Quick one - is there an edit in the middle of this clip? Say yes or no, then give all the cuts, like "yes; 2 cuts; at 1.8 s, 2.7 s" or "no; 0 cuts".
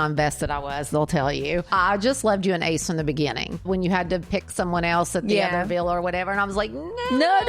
yes; 2 cuts; at 1.7 s, 3.6 s